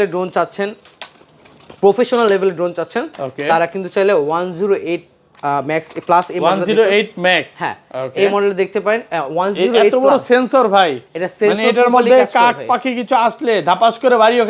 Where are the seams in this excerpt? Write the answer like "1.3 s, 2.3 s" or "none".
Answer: none